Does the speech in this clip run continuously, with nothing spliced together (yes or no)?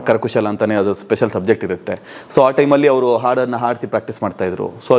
yes